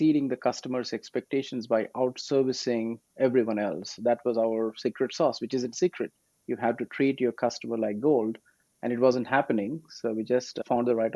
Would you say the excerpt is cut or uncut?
uncut